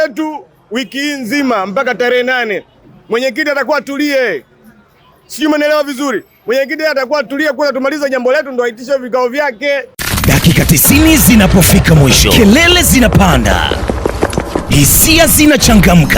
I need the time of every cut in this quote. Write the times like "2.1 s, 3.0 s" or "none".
10.1 s